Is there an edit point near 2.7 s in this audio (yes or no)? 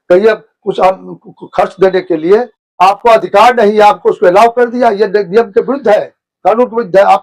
yes